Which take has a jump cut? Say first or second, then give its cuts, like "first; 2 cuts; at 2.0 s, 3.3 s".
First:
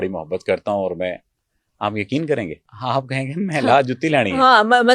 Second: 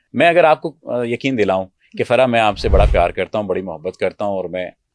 first; 1 cut; at 2.7 s